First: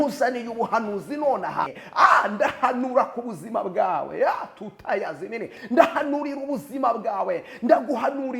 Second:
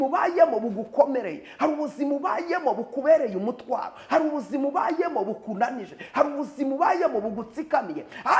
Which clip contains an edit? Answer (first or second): first